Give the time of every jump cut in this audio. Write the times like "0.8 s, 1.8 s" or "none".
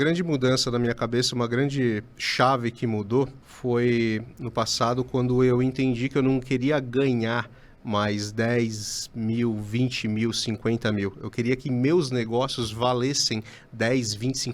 none